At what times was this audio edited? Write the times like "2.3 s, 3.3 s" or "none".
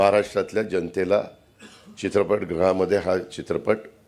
none